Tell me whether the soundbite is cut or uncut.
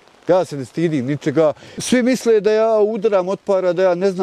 cut